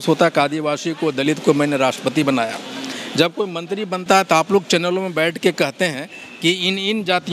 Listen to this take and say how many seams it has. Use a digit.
0